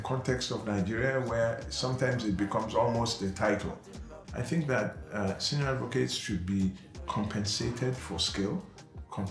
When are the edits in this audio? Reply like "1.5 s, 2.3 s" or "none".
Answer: none